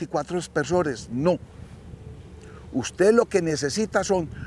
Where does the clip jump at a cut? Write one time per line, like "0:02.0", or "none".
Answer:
none

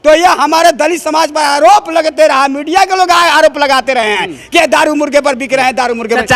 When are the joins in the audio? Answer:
none

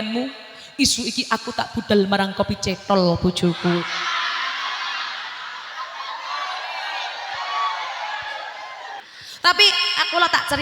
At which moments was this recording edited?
0:09.0

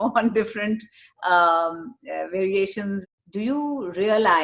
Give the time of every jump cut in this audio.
0:03.0

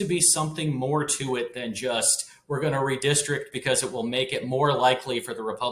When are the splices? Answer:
none

